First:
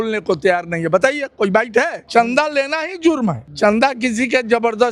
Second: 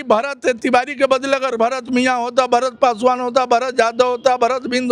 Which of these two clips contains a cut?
first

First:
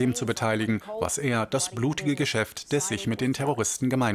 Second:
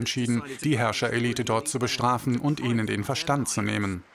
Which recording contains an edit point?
second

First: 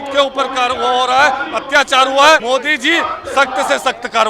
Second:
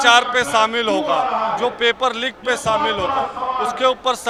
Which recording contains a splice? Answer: first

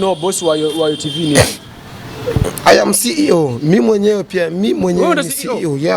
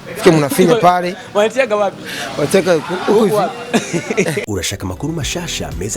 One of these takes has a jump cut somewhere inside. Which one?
second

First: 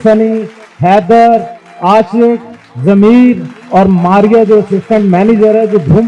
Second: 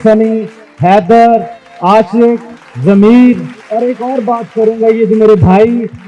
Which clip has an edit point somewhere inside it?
second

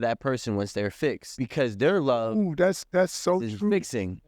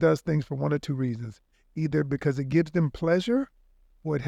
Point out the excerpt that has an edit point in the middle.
first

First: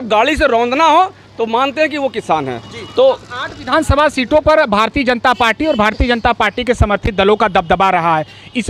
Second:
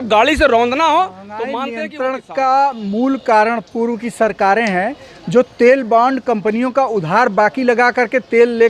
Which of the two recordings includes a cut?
second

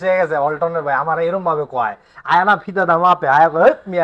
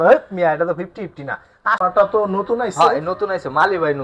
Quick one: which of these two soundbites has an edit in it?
second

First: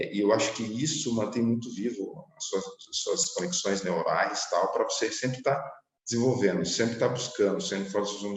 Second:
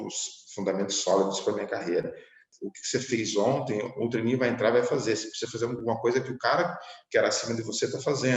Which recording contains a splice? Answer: second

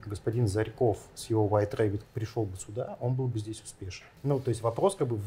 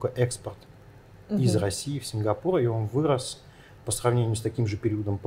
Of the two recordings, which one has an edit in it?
first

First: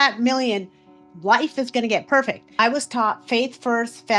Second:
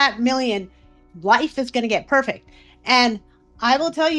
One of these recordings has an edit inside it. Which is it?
first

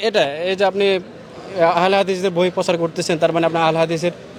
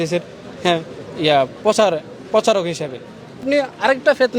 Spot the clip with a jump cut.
second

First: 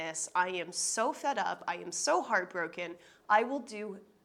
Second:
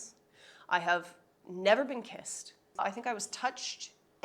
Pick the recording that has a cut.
second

